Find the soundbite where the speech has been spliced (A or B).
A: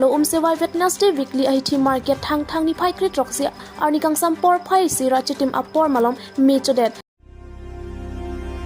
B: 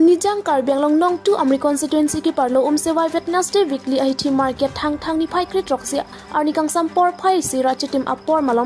A